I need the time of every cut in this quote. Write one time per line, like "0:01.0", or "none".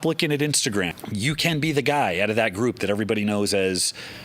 0:00.9